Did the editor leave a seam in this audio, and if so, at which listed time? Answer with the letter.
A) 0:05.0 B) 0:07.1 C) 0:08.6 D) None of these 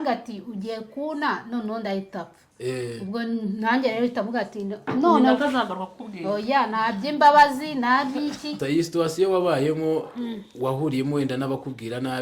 C